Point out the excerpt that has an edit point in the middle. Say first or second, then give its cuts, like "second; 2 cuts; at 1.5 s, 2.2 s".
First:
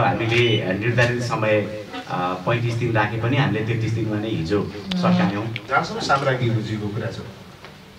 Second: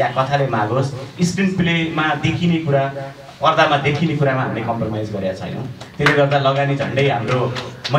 first; 1 cut; at 5.6 s